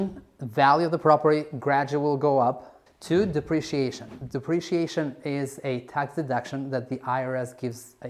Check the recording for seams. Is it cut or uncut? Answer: cut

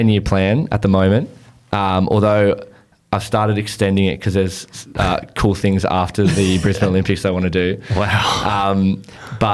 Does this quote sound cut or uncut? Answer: uncut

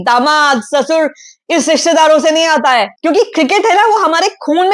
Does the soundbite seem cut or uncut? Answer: cut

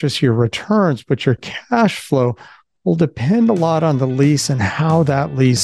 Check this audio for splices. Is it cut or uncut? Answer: uncut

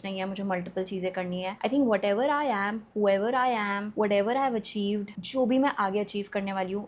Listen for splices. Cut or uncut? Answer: uncut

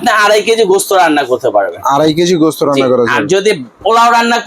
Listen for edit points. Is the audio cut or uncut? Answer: uncut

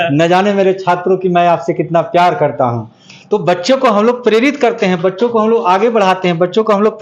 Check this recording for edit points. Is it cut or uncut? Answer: uncut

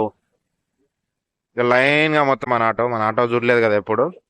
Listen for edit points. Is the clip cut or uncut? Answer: cut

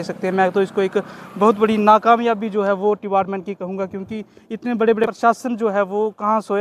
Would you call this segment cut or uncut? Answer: cut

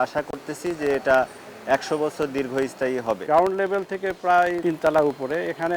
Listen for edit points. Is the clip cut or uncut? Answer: cut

